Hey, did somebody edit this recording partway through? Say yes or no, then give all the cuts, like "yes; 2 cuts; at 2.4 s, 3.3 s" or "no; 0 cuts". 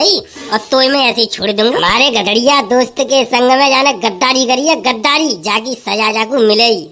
yes; 1 cut; at 1.8 s